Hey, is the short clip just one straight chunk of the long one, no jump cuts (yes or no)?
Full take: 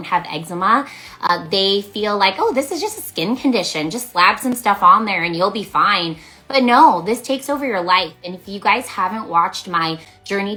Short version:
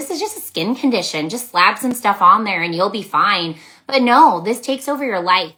yes